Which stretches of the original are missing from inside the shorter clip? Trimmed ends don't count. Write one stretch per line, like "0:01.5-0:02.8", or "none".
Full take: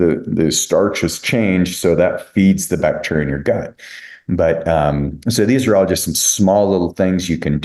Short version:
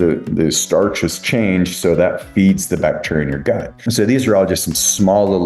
0:03.8-0:05.2